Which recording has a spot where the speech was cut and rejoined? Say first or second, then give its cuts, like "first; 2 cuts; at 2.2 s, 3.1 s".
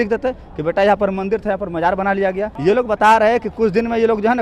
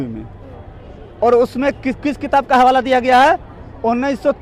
first; 1 cut; at 2.5 s